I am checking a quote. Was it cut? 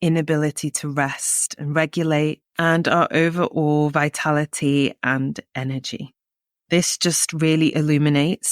yes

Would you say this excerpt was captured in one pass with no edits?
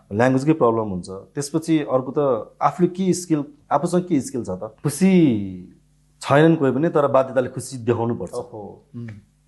no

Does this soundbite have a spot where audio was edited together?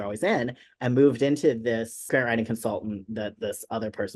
yes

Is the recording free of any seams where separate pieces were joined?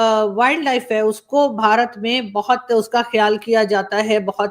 yes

